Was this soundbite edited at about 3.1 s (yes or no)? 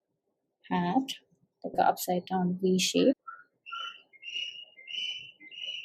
yes